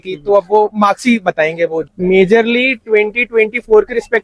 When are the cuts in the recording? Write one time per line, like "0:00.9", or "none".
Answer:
0:01.8